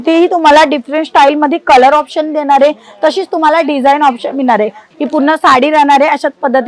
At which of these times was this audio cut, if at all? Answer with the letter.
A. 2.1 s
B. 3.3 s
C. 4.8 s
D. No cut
C